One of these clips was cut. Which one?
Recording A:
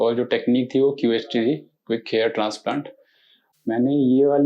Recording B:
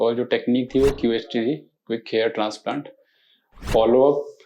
B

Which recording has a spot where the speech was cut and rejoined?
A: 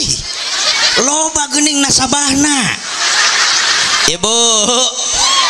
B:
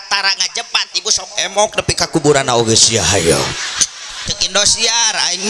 B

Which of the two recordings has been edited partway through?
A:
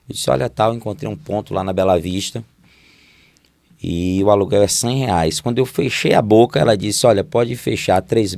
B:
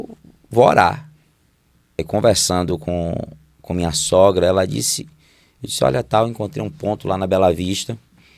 B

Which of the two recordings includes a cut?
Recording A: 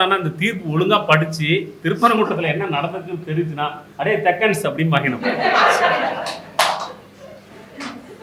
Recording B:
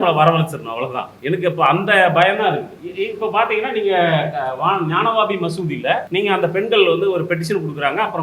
B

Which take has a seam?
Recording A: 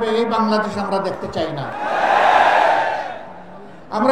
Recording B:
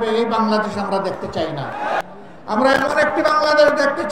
B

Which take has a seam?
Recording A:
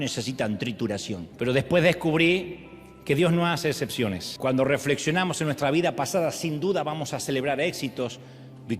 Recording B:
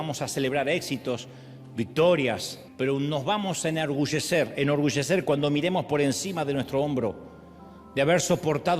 A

